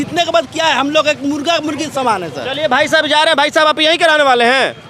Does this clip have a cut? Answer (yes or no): no